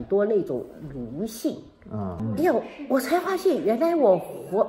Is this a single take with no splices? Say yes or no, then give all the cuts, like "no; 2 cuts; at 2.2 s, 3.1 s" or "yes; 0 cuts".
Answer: no; 1 cut; at 2.2 s